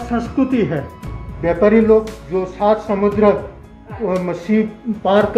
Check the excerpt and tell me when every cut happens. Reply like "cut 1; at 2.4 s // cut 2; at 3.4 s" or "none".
cut 1; at 1.1 s